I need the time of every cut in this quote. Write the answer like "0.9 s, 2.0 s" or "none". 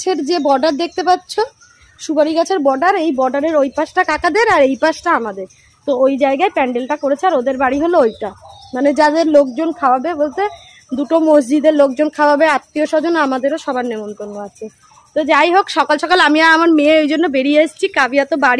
none